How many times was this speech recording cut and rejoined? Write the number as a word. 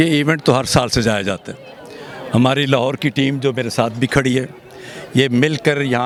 zero